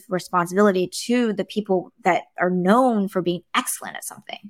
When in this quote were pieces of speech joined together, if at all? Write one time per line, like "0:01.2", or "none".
none